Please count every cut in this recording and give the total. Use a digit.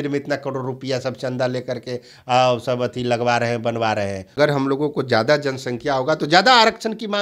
1